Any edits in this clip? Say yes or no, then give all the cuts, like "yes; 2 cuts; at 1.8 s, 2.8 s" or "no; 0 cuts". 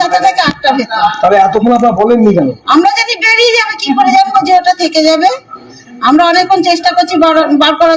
no; 0 cuts